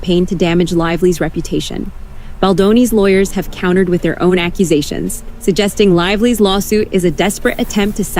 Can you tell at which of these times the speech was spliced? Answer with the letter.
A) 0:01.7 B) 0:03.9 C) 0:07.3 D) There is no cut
A